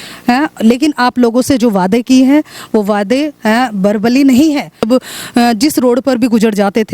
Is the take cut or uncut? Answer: cut